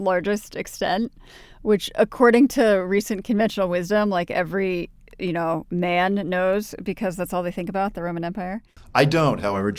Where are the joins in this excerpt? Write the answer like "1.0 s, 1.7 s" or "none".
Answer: 8.7 s